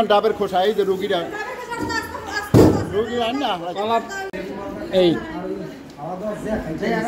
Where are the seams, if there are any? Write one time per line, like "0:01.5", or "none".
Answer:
0:04.3